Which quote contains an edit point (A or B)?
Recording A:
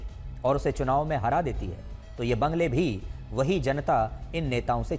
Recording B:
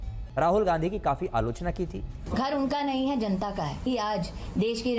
B